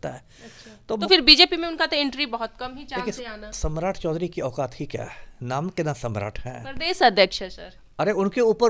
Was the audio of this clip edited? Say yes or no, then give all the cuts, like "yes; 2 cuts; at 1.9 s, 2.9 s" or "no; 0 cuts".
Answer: yes; 1 cut; at 1.0 s